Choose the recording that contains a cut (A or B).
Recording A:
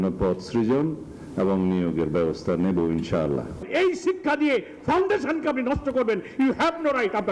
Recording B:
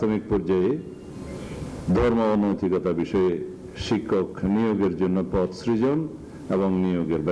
A